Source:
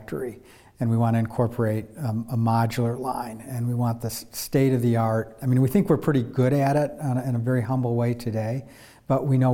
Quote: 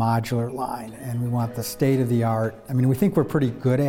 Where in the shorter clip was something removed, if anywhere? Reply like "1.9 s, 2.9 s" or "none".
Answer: 1.6 s